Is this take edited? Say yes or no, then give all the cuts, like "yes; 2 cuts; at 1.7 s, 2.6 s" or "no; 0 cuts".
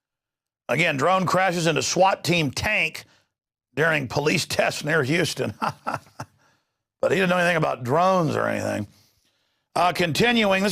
yes; 1 cut; at 8.5 s